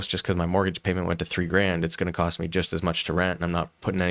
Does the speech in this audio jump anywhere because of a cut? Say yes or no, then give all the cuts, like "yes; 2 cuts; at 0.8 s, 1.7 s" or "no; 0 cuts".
no; 0 cuts